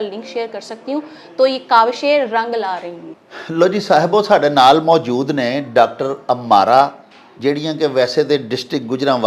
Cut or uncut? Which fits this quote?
uncut